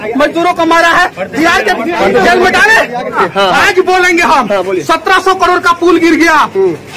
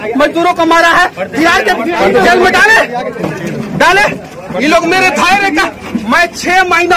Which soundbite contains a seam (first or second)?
first